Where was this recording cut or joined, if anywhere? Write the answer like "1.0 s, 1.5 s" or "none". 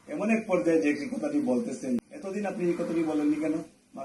2.0 s